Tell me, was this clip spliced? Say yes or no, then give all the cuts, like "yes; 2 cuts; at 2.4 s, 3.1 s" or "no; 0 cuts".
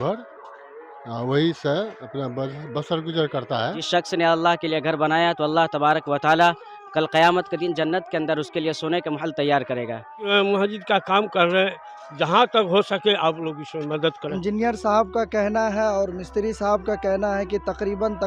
yes; 3 cuts; at 3.8 s, 10.3 s, 14.3 s